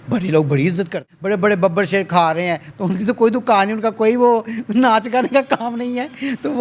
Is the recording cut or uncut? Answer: cut